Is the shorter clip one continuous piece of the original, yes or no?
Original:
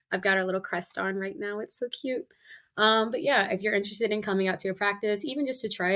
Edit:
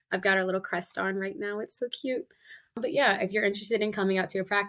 no